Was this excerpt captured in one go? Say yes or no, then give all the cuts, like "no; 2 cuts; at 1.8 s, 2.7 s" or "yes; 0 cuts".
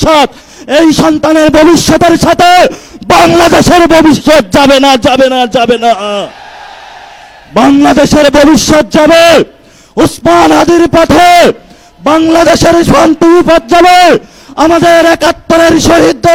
yes; 0 cuts